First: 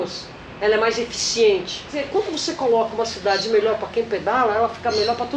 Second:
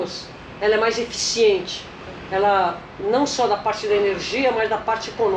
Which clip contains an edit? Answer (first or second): first